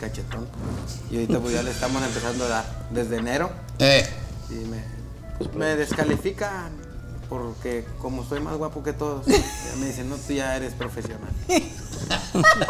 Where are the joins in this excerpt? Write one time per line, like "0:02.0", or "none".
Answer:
0:05.5